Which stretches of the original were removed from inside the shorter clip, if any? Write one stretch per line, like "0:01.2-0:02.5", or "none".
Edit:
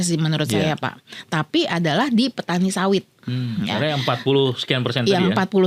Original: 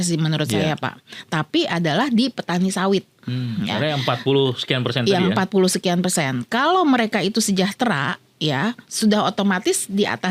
none